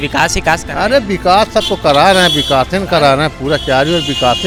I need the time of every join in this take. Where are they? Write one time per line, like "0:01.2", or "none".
none

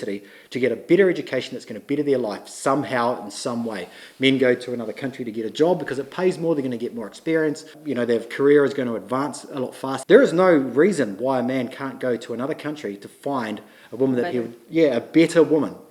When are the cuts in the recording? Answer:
0:07.7
0:09.9

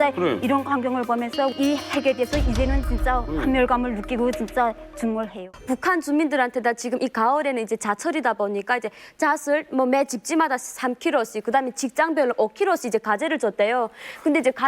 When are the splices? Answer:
0:05.3

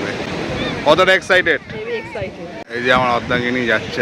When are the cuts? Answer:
0:02.7

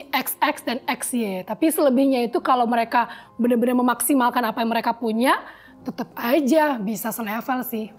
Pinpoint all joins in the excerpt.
none

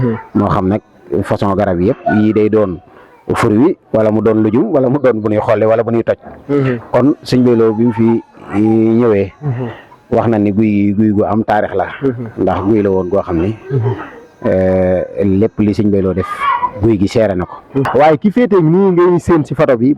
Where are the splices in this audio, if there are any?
0:17.9

